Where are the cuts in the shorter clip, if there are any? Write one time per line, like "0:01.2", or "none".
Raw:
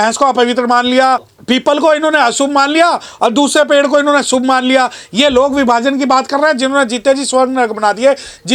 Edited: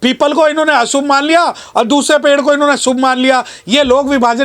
none